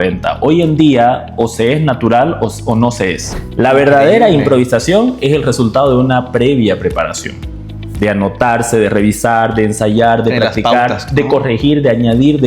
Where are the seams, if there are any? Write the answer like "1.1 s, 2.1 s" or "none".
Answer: 3.3 s